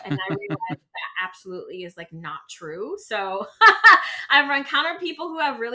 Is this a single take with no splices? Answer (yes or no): yes